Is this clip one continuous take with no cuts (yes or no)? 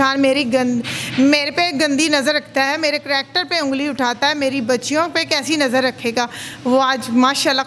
yes